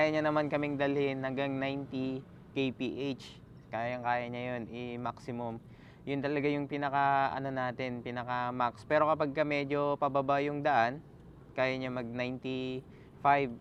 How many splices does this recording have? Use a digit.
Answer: 0